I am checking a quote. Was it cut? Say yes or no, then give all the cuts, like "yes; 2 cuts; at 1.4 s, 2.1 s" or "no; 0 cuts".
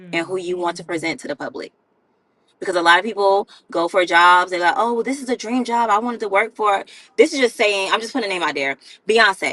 no; 0 cuts